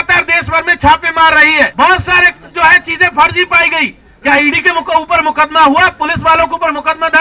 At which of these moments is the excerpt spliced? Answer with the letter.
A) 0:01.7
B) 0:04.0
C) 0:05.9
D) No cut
A